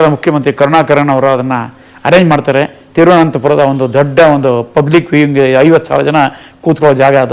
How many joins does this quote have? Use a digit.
0